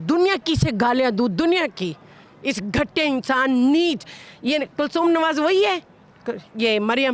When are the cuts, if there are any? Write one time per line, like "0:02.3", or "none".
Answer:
none